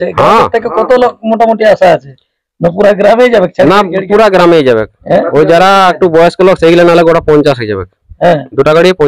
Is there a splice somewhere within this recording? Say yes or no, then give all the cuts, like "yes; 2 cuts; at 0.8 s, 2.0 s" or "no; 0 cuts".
no; 0 cuts